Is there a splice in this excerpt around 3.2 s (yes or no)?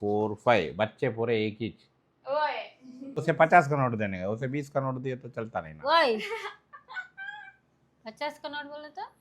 yes